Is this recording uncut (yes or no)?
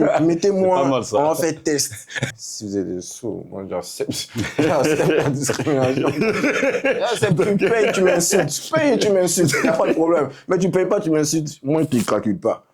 no